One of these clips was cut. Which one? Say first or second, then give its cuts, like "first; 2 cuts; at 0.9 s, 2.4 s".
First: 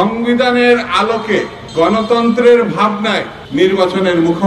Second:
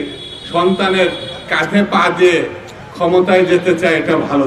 first; 2 cuts; at 1.6 s, 3.3 s